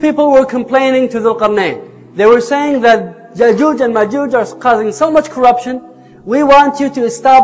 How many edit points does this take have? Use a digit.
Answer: 0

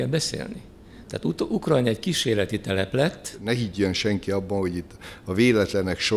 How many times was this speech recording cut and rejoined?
1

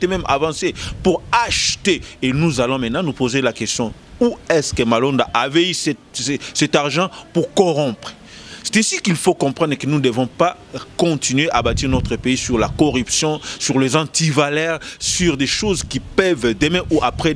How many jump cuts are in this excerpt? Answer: 0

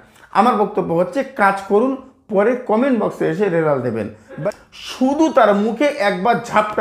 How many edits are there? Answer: 1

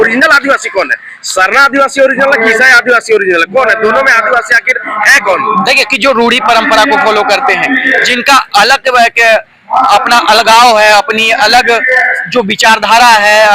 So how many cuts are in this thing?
1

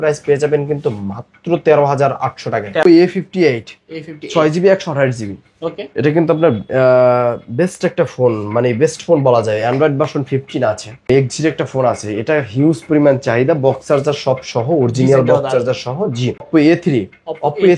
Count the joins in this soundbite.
3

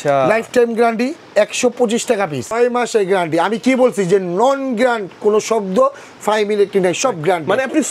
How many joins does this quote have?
1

